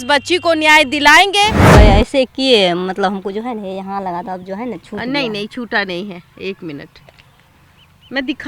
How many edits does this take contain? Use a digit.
1